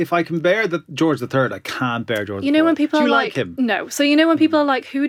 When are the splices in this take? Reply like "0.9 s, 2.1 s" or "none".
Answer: none

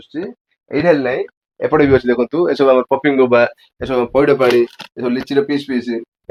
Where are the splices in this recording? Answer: none

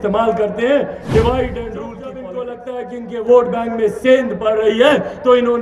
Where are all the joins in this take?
2.1 s

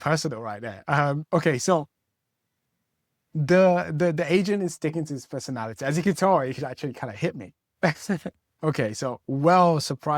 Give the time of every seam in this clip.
8.4 s

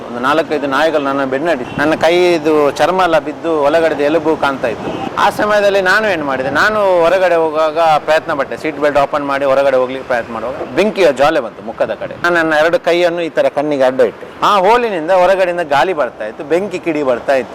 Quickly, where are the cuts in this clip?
1.7 s, 5.1 s, 10.6 s, 14.3 s

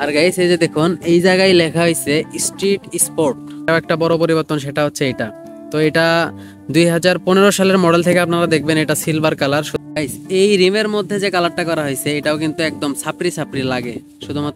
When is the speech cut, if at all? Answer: 3.7 s, 9.7 s

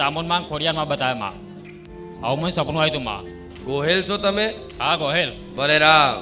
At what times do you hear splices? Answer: 3.4 s

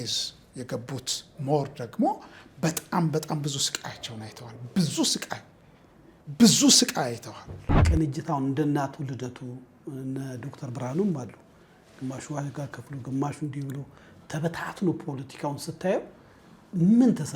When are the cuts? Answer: 7.8 s

